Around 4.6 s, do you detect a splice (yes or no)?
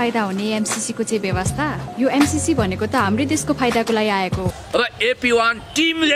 yes